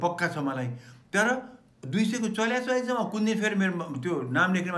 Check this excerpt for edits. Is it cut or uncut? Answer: uncut